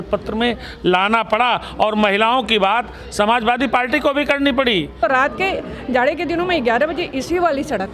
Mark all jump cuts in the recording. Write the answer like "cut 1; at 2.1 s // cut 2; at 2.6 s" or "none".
cut 1; at 5.0 s